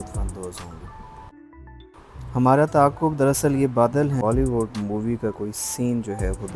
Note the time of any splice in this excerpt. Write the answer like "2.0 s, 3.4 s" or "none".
1.3 s, 4.2 s